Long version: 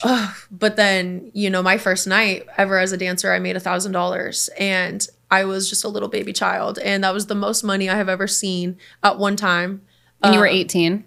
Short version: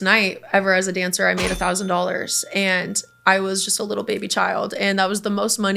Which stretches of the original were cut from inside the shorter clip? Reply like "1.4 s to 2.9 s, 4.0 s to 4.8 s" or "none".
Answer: none